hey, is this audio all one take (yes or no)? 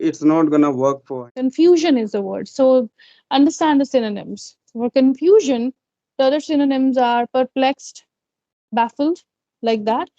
no